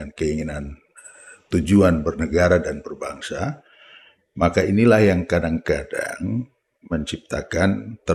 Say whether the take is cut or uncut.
uncut